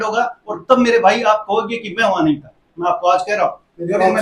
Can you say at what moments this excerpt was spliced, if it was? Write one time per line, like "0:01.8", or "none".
none